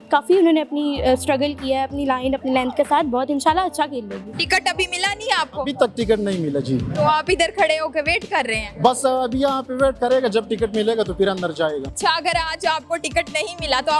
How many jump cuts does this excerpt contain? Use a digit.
2